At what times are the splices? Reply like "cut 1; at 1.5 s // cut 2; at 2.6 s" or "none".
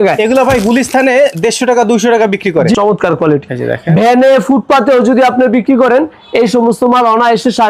cut 1; at 2.7 s